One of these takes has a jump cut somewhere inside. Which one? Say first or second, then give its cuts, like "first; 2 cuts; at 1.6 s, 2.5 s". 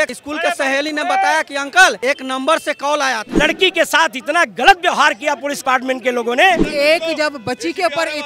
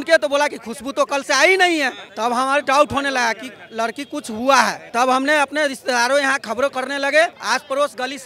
first; 3 cuts; at 2.0 s, 3.3 s, 6.6 s